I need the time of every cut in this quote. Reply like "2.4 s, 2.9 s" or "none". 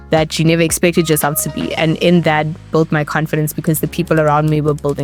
none